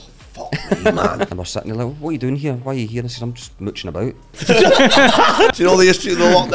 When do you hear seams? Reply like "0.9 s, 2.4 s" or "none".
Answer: 1.3 s, 4.4 s, 5.6 s